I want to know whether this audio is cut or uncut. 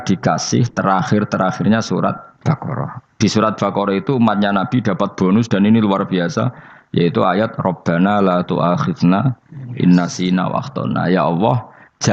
cut